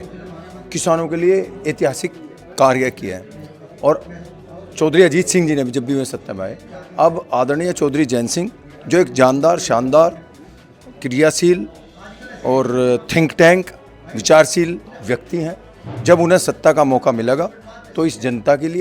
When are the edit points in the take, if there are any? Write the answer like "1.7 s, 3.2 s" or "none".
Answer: none